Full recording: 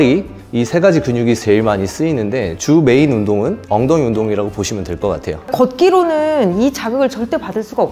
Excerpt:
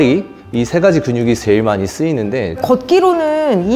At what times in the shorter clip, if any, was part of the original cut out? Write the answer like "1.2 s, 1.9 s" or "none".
2.5 s

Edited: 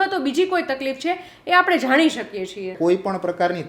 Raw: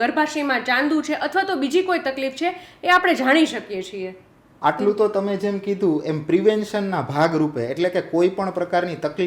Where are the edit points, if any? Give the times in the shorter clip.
2.7 s

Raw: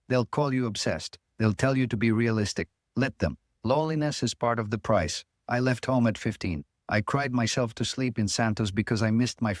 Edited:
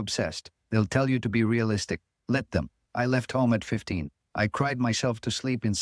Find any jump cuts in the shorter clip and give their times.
2.8 s

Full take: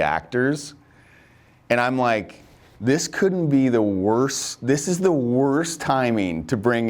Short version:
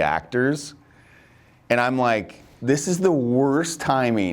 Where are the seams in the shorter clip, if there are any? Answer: 2.5 s

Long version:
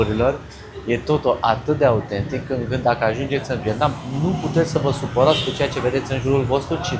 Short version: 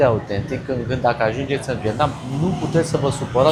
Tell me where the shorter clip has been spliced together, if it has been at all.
none

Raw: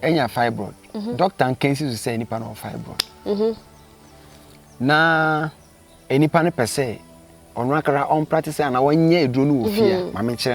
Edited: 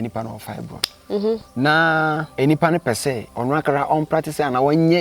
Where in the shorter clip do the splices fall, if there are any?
1.5 s, 2.3 s, 3.3 s

